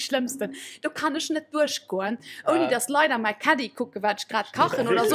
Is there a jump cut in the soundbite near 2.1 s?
no; 0 cuts

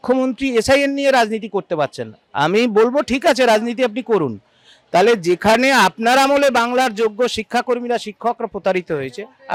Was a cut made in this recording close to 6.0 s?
no; 0 cuts

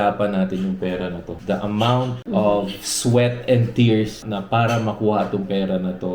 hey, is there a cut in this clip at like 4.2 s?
yes; 3 cuts; at 1.3 s, 2.2 s, 4.2 s

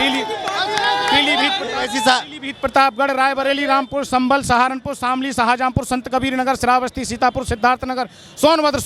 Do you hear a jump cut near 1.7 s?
no; 0 cuts

